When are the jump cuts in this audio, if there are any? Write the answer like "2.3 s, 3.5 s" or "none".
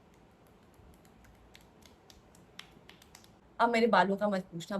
3.4 s